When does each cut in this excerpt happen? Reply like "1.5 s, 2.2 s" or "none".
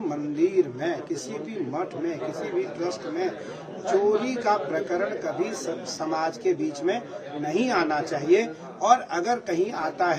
none